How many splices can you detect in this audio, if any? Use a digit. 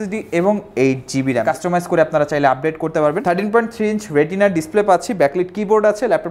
2